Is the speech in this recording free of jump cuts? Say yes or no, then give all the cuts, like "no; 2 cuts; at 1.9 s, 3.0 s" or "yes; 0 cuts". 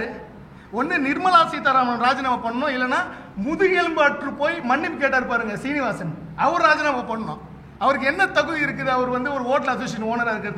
yes; 0 cuts